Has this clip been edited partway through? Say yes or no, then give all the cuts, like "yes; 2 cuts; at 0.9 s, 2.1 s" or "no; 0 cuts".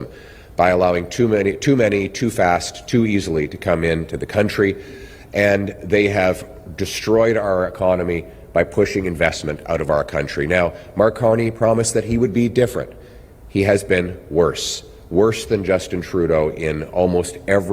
no; 0 cuts